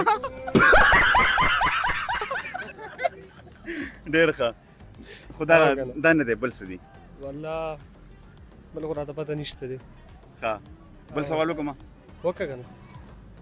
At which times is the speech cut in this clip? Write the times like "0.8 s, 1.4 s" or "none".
none